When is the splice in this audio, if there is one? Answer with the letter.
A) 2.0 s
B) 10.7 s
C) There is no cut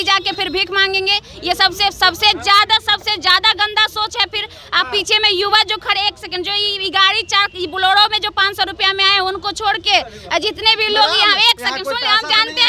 C